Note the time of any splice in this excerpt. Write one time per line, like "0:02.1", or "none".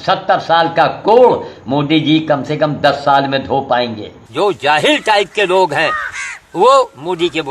0:04.2